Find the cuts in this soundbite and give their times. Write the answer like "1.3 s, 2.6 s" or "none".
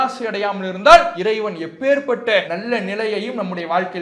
1.1 s, 2.5 s